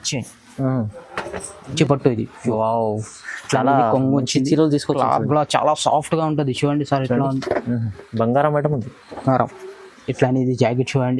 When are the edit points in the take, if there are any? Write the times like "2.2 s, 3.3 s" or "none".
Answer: 1.7 s